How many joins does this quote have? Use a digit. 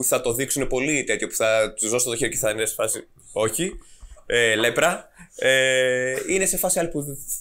0